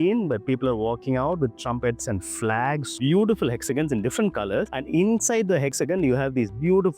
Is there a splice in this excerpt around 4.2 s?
no; 2 cuts; at 3.0 s, 5.7 s

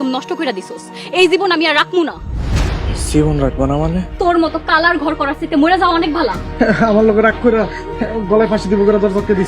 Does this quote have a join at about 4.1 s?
yes; 2 cuts; at 4.1 s, 6.4 s

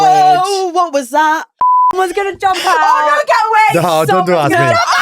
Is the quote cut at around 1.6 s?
yes; 1 cut; at 1.6 s

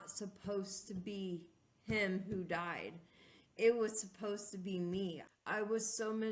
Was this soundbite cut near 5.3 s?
yes; 1 cut; at 5.3 s

